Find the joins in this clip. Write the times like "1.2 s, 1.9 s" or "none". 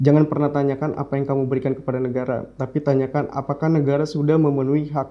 none